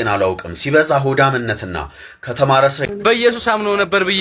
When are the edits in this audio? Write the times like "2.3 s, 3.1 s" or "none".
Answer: 2.8 s